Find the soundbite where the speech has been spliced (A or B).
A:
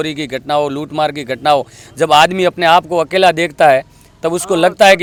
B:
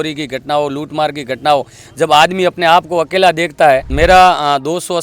B